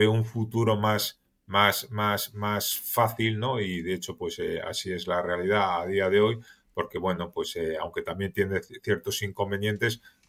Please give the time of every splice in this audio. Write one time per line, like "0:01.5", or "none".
none